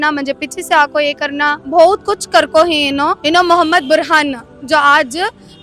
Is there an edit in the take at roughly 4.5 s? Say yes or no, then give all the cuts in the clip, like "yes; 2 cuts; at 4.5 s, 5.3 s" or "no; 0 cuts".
no; 2 cuts; at 1.6 s, 3.2 s